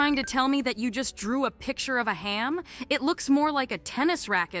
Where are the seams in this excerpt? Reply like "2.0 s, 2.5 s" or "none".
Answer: none